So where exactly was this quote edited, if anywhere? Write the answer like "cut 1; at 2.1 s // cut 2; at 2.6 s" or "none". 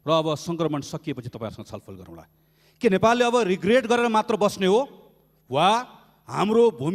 none